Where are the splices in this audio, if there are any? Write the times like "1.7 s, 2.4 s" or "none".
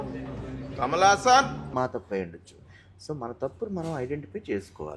1.7 s